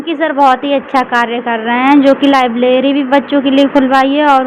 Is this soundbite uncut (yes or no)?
yes